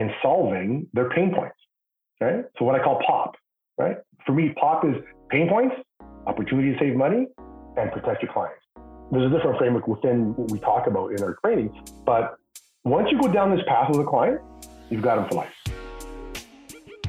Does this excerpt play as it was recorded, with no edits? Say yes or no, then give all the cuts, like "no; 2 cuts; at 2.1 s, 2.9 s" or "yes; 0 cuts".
no; 1 cut; at 15.6 s